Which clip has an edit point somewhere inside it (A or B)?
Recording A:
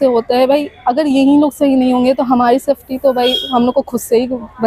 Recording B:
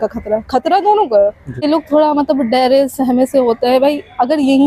B